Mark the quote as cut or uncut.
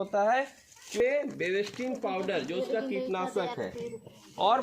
cut